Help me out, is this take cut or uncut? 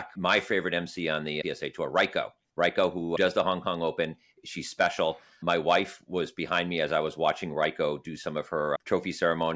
cut